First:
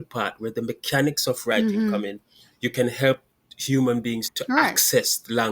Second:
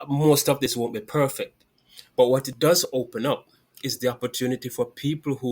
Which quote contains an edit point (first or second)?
first